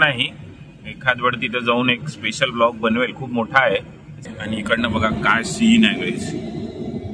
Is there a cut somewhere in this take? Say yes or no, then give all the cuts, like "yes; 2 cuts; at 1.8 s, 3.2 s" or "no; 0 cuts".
yes; 1 cut; at 4.3 s